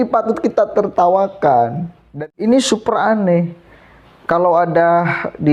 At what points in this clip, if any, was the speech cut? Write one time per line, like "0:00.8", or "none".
0:02.2

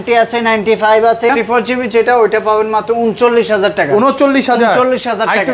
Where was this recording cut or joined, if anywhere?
0:01.3

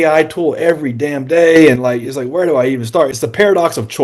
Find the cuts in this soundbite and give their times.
0:03.1

